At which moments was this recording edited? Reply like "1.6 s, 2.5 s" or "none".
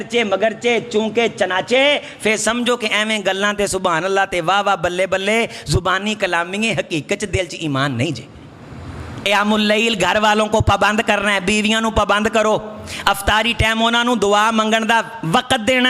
9.3 s